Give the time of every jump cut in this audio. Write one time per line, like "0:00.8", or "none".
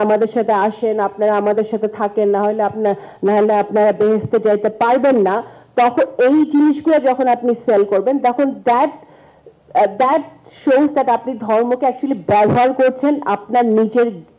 none